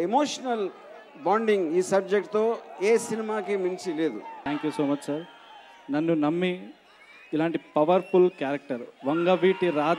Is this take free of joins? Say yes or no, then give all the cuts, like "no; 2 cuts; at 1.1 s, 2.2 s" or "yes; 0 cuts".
no; 1 cut; at 4.4 s